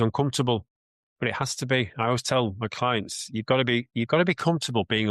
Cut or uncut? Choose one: uncut